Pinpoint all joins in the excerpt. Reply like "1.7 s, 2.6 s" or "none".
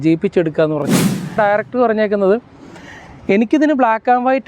1.4 s